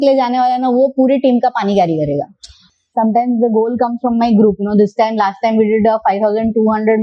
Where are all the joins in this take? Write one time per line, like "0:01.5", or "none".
0:02.7